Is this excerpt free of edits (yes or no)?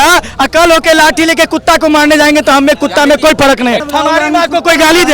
no